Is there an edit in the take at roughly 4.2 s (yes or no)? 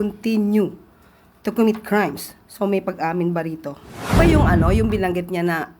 yes